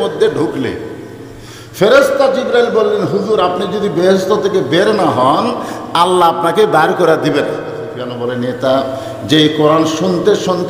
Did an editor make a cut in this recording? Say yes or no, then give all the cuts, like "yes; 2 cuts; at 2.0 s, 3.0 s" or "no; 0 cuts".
yes; 1 cut; at 8.1 s